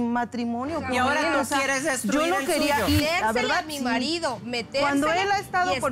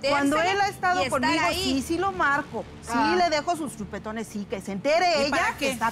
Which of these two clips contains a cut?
first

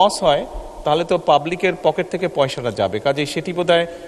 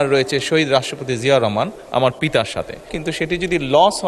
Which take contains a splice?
second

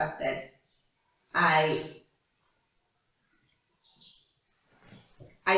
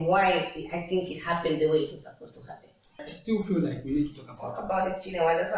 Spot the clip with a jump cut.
second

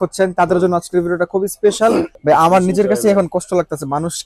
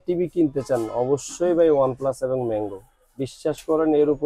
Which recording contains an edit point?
first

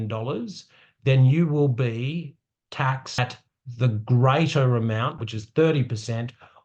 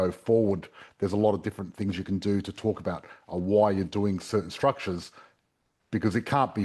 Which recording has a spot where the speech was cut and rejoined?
first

